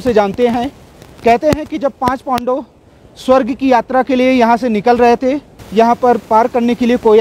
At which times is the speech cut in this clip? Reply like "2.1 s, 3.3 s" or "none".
5.5 s